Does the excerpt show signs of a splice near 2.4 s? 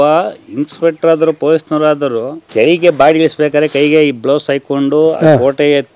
yes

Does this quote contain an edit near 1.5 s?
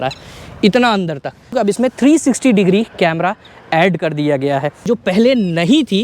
yes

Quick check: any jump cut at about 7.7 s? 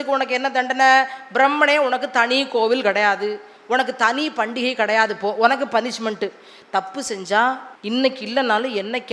yes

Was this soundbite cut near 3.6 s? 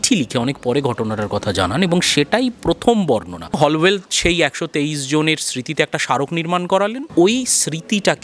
yes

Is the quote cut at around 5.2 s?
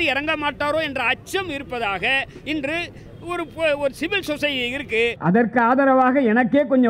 yes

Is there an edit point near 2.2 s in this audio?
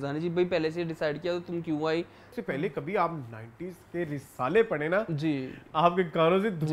yes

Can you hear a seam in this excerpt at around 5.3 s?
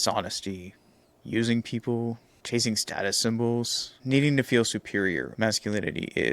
yes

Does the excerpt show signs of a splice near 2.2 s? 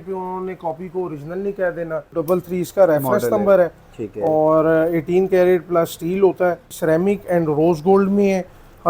yes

